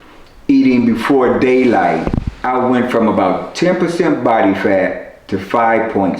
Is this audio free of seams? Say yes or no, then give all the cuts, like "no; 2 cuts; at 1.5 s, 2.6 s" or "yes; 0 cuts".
no; 1 cut; at 2.3 s